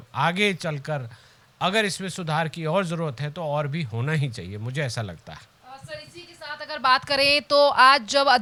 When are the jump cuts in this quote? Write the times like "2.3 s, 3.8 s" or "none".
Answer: none

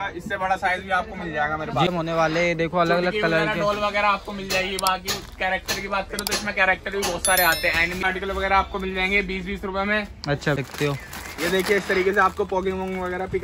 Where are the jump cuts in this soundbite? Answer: 1.9 s, 8.0 s, 10.6 s

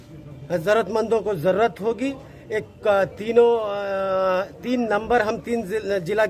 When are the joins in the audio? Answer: none

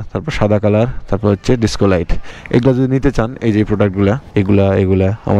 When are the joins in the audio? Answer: none

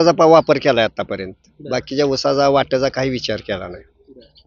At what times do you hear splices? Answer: none

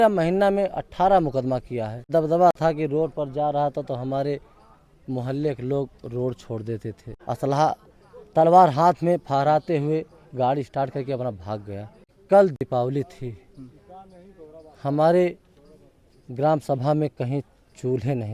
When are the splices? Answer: 2.1 s, 7.1 s, 12.2 s

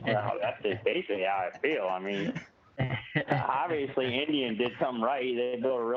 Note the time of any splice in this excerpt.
none

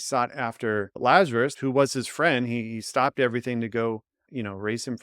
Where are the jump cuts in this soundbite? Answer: 0.9 s, 1.6 s

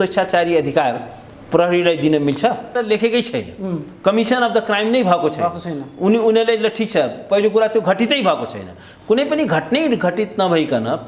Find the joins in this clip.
2.7 s

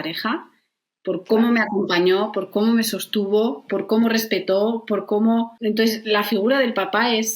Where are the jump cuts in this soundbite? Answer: 5.5 s

